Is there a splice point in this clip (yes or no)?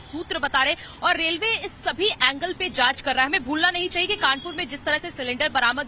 yes